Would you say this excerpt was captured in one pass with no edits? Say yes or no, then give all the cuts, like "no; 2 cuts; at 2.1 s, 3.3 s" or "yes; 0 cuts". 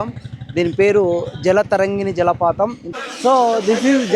no; 1 cut; at 2.8 s